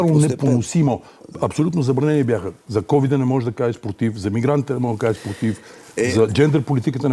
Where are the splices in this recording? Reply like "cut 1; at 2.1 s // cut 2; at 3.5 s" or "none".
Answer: none